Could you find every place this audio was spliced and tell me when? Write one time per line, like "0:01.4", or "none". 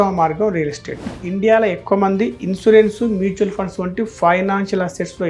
0:01.1